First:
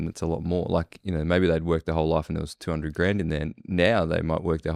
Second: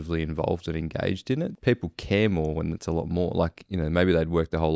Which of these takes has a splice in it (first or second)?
second